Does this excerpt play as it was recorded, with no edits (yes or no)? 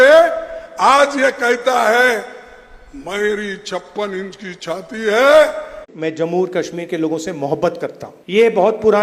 no